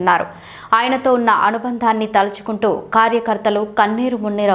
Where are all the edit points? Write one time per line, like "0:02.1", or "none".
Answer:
none